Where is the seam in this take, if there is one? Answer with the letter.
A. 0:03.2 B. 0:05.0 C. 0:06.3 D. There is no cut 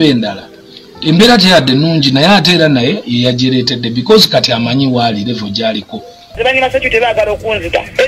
C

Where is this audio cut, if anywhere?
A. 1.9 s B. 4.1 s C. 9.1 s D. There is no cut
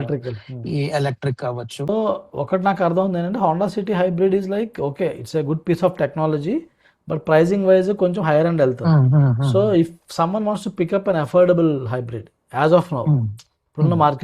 A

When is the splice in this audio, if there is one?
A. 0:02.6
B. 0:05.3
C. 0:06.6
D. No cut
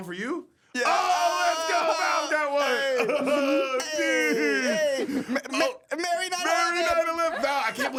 D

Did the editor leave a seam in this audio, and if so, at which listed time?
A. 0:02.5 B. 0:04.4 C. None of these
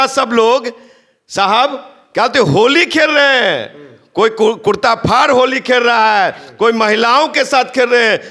C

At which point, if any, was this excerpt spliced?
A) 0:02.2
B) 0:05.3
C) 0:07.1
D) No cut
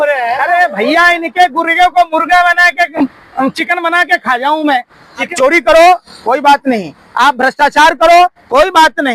B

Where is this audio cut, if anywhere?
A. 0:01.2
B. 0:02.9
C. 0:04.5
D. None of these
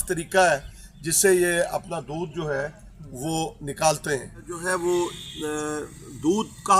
C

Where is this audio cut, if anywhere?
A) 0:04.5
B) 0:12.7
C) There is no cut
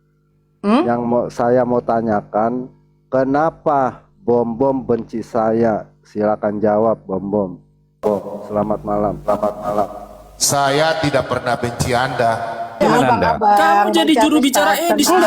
B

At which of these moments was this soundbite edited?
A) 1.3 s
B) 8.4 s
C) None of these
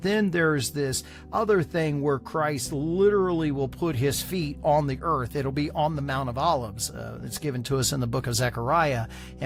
C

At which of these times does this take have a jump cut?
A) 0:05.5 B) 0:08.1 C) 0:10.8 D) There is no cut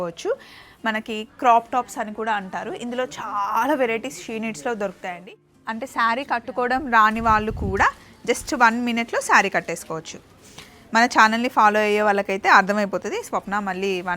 A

